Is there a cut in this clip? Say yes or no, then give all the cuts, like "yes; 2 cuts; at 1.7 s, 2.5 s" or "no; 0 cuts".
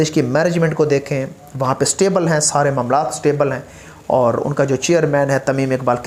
no; 0 cuts